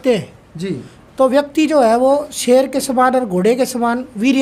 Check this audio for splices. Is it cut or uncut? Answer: uncut